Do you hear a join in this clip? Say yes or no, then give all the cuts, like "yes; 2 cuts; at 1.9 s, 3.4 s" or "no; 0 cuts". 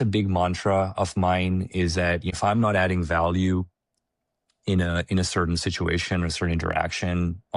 yes; 1 cut; at 2.3 s